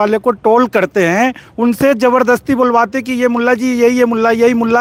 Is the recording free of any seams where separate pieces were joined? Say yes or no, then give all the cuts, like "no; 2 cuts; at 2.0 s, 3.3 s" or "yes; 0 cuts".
yes; 0 cuts